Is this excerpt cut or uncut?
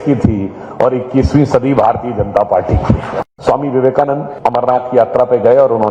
cut